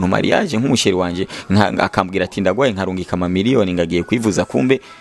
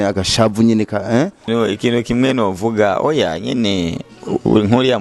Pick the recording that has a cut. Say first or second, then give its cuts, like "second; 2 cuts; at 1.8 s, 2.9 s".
second; 1 cut; at 1.5 s